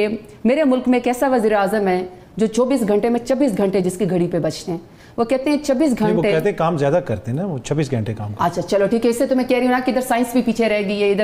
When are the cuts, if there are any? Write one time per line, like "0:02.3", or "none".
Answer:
none